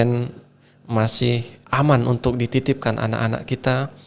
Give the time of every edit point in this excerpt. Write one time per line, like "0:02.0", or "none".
0:01.5